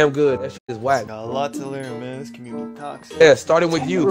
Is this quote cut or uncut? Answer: cut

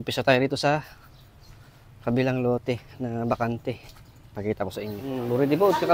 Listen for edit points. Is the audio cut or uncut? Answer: cut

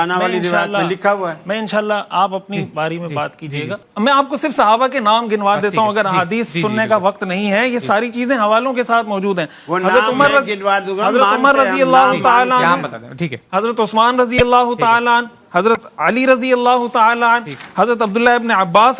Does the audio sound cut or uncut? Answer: cut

